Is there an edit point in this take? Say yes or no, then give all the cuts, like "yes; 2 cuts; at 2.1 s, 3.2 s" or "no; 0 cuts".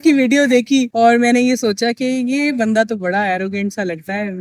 no; 0 cuts